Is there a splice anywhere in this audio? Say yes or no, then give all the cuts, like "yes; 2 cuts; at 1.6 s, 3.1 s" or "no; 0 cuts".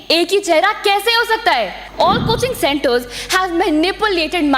yes; 1 cut; at 1.8 s